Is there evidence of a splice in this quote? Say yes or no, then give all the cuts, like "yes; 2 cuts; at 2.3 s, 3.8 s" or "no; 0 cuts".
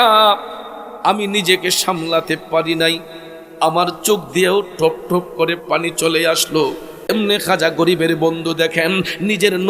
yes; 1 cut; at 7.1 s